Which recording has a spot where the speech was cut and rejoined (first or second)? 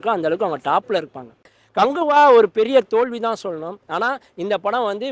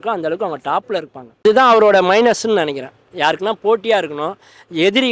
first